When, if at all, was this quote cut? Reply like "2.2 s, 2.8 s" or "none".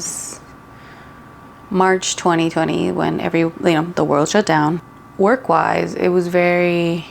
4.9 s